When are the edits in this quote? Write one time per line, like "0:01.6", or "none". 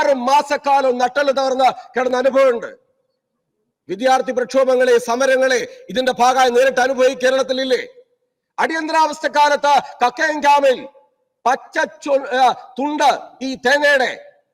none